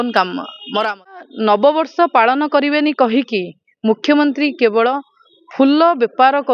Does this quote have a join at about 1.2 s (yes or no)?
yes